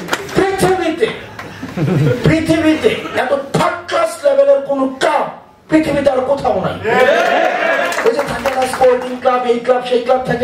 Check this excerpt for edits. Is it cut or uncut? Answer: uncut